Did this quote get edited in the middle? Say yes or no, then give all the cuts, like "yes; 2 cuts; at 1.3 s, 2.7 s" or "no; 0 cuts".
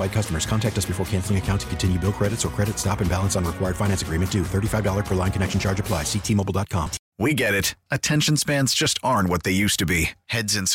yes; 1 cut; at 7.0 s